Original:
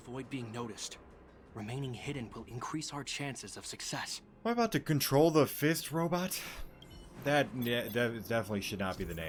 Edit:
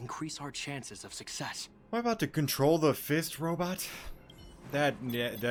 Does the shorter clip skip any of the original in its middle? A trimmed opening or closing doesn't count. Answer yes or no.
no